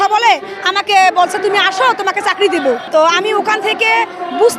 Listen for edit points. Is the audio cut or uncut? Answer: cut